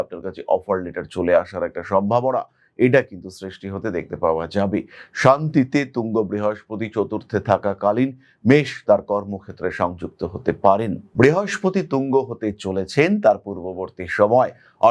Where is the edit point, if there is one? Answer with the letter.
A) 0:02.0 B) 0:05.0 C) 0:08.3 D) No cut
D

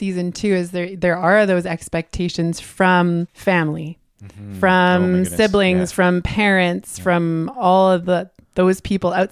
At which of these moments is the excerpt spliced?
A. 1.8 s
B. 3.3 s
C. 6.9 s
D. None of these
B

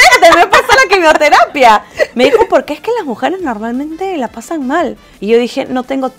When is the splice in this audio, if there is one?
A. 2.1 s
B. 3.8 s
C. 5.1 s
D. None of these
C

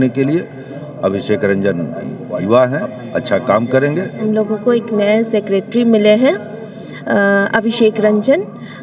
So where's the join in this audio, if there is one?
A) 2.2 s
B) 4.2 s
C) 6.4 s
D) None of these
B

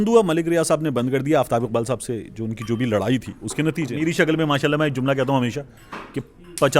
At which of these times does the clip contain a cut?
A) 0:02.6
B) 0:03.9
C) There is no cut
B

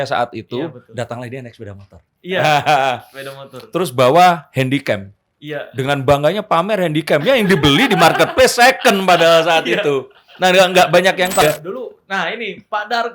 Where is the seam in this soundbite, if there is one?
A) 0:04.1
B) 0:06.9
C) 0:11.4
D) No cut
C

